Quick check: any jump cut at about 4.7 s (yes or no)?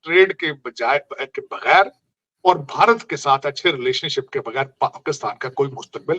no